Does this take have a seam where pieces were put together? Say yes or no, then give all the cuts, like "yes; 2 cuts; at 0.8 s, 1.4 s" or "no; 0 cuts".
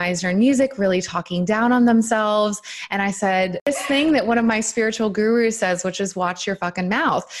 yes; 1 cut; at 3.7 s